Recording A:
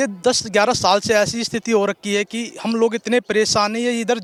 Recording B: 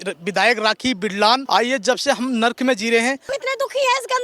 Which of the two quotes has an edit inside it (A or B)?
B